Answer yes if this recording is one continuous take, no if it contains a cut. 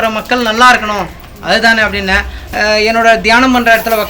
no